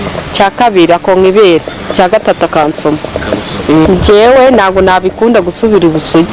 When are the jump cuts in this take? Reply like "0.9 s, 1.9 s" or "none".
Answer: 3.9 s